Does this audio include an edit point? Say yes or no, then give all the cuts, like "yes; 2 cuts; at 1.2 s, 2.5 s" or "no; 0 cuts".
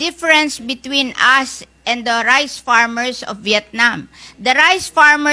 no; 0 cuts